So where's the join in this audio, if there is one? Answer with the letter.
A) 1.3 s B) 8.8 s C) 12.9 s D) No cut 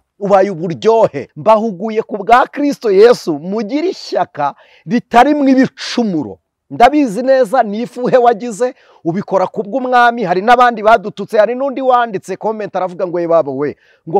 A